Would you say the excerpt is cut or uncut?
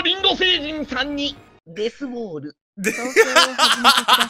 uncut